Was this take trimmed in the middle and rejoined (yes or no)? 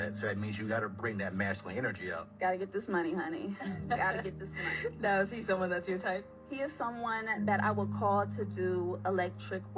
yes